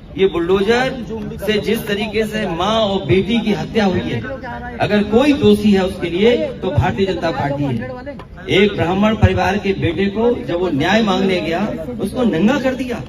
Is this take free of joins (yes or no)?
yes